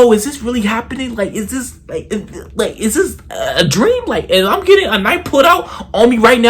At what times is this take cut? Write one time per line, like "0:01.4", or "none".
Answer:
0:02.0